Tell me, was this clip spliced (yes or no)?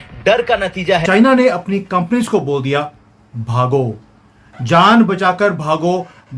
yes